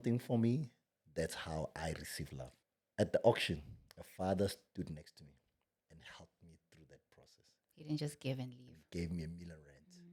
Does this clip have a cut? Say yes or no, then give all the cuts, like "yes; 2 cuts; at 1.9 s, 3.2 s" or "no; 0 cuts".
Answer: yes; 1 cut; at 2.6 s